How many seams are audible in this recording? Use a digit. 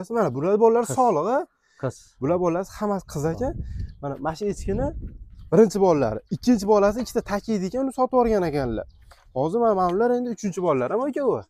0